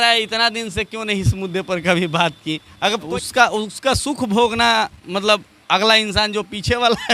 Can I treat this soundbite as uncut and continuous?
no; 1 cut; at 3.1 s

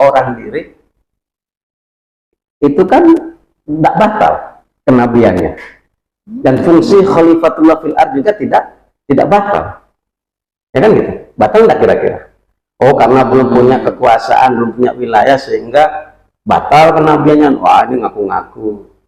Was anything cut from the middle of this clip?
no; 0 cuts

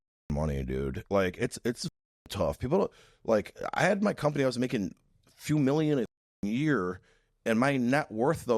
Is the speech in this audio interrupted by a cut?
yes; 1 cut; at 1.0 s

